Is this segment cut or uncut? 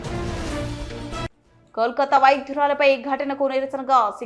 cut